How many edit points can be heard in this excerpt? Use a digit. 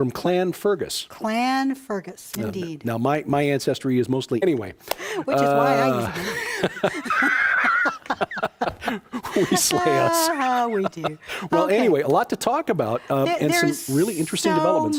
0